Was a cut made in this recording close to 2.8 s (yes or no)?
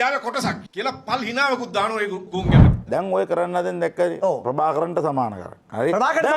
yes